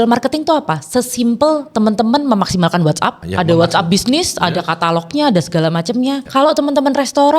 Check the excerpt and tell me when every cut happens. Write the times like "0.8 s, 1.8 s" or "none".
3.2 s, 6.2 s